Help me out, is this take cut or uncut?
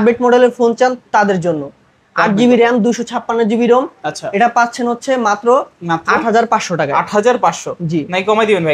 uncut